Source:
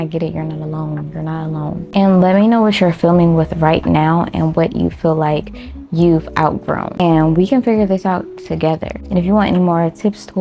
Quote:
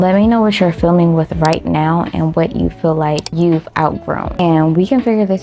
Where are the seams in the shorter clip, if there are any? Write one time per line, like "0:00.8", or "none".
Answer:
0:03.3